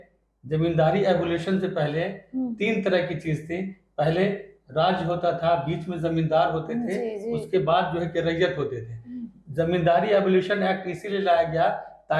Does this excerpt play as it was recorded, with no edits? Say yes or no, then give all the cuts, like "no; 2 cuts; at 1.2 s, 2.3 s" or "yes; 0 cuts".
yes; 0 cuts